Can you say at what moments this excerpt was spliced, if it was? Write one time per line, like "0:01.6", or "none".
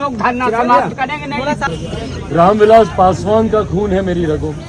0:01.7